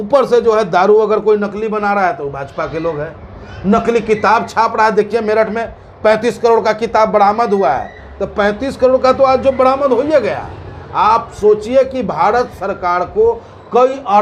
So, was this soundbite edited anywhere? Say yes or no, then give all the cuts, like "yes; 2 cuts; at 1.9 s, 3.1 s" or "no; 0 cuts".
no; 0 cuts